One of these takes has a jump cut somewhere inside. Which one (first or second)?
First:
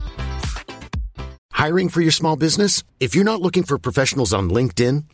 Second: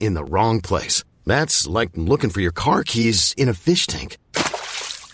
first